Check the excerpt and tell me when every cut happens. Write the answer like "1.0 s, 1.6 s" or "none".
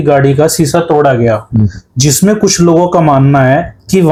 none